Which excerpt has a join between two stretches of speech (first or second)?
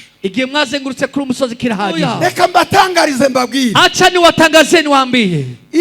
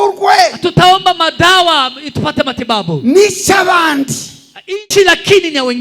first